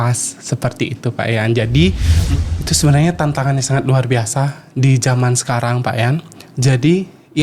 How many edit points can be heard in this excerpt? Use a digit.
1